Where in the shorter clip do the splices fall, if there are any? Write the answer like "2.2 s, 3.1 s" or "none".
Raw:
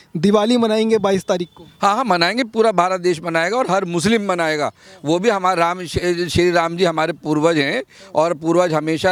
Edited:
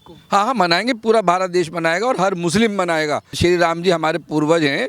3.3 s